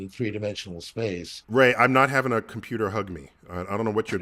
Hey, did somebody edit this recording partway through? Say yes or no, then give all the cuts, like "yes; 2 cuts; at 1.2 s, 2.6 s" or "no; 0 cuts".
yes; 1 cut; at 1.5 s